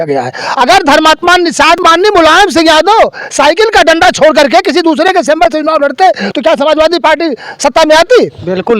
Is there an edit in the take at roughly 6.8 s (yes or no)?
no